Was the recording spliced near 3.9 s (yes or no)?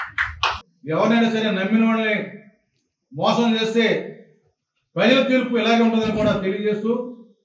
no